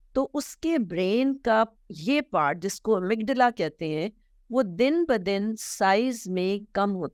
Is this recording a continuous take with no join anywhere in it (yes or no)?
yes